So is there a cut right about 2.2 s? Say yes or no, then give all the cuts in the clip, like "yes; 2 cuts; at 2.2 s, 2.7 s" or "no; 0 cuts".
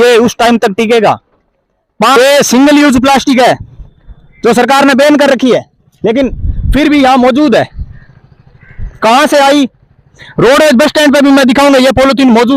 yes; 1 cut; at 2.2 s